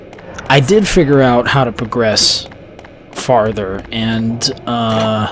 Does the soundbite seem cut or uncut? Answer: cut